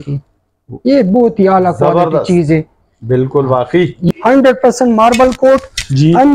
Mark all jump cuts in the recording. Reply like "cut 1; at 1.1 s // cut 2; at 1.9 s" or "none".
cut 1; at 4.1 s